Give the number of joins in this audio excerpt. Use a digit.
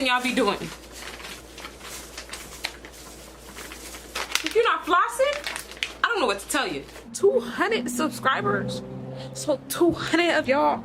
2